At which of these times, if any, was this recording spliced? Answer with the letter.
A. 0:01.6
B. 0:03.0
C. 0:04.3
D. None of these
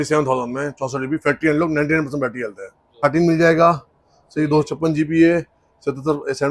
B